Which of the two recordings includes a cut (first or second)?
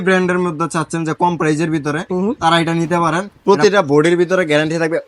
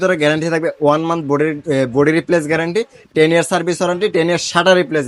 first